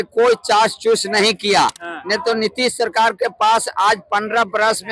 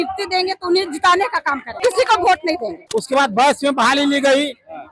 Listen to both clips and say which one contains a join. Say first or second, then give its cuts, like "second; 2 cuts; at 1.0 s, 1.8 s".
second; 2 cuts; at 1.8 s, 2.8 s